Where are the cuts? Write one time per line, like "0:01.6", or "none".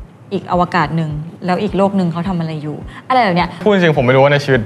0:03.6